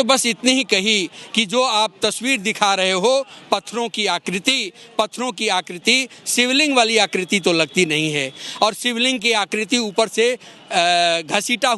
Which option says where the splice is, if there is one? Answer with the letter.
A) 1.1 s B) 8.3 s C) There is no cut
C